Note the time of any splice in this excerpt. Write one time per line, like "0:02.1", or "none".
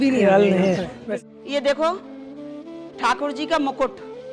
0:00.9